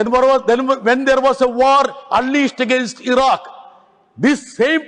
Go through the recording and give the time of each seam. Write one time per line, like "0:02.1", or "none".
none